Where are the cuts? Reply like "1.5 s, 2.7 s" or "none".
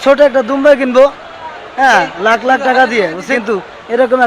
3.3 s